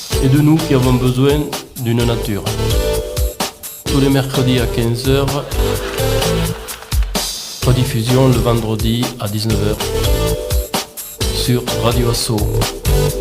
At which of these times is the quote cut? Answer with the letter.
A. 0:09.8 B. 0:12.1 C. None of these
A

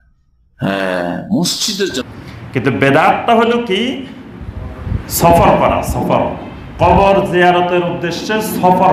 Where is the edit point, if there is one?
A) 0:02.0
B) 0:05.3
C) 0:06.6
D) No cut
A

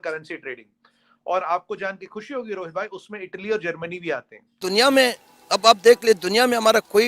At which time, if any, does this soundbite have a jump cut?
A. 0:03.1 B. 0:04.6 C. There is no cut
B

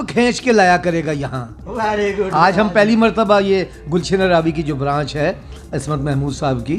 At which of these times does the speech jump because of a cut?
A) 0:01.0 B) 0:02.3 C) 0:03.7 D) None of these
D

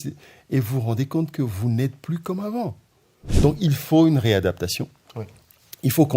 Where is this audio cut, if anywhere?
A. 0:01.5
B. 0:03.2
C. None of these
B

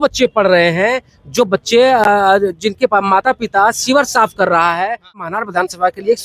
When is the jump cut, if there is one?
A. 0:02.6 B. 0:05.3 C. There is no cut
B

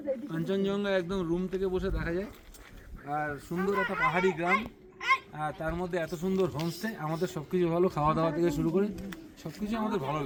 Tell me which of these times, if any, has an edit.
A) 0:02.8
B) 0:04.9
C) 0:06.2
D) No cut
D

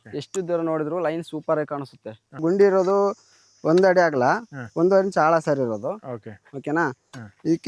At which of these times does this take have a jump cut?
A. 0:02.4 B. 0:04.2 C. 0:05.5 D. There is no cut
A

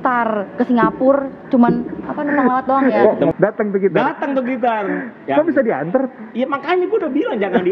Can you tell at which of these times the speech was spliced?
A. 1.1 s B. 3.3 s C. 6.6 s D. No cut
B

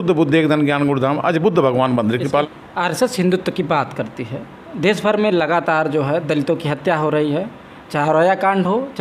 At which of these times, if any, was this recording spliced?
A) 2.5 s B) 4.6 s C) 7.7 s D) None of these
A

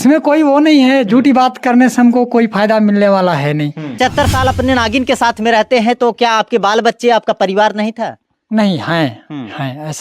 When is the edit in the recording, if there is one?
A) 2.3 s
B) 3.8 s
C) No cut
B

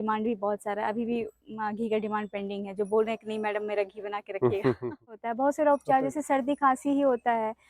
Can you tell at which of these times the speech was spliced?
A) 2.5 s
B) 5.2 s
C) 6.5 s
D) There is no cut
B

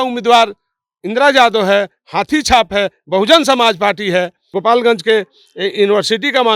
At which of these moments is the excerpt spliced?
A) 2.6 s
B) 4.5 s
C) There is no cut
B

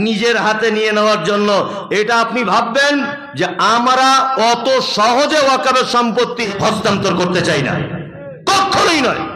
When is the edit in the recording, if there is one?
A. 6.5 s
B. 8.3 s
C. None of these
A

